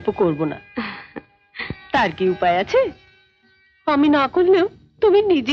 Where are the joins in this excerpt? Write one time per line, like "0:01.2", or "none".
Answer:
none